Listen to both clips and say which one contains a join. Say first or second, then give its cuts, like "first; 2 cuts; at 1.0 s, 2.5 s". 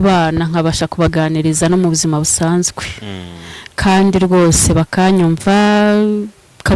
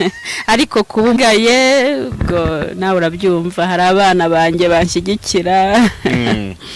second; 1 cut; at 1.2 s